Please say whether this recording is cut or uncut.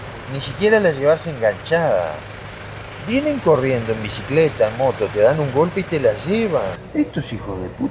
cut